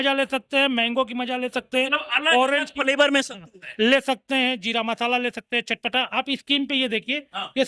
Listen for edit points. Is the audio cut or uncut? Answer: uncut